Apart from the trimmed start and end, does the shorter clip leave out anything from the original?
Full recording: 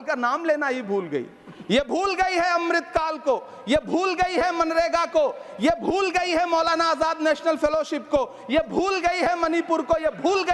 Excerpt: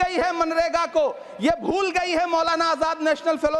no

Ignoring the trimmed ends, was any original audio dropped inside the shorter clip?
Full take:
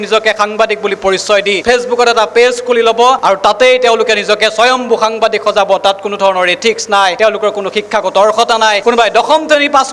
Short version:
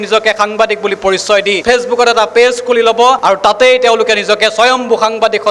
no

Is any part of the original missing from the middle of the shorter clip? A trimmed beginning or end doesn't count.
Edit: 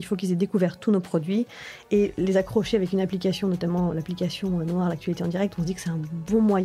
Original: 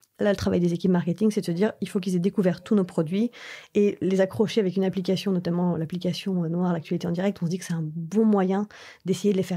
no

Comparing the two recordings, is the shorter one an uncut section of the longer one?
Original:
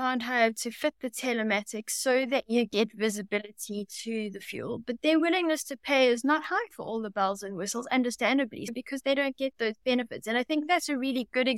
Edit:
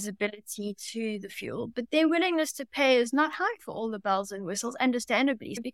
yes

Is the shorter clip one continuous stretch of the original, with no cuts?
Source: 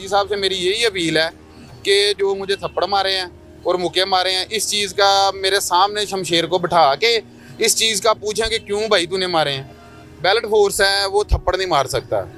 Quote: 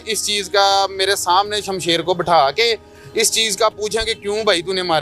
yes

